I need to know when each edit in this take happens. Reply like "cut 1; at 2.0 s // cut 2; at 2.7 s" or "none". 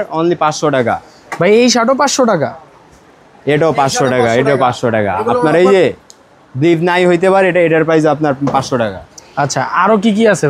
none